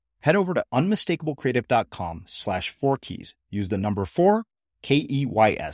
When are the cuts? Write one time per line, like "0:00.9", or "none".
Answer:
none